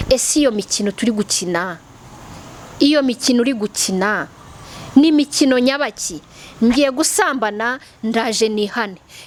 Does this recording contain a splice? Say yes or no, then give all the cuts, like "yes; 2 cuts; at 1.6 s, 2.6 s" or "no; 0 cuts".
no; 0 cuts